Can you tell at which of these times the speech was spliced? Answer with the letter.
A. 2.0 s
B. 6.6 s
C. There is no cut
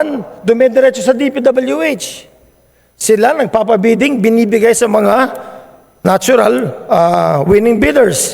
C